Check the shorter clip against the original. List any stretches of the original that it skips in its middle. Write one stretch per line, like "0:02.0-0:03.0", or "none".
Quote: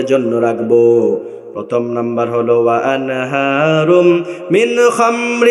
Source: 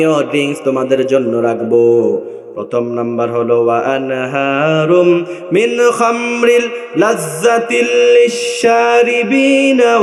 none